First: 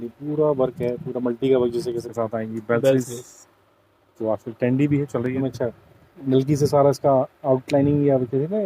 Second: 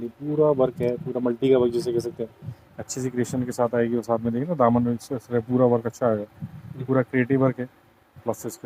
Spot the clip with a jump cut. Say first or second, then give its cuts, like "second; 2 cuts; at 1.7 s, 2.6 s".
first; 2 cuts; at 2.0 s, 5.4 s